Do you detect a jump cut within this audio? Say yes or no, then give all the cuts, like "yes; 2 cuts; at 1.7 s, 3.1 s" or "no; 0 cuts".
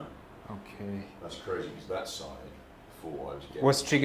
no; 0 cuts